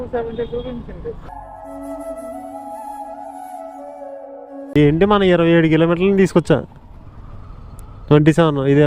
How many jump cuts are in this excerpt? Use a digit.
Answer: 1